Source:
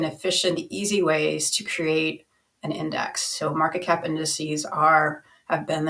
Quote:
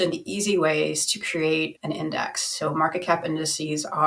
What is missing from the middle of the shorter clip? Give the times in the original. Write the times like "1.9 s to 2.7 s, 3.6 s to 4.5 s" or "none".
2.2 s to 2.6 s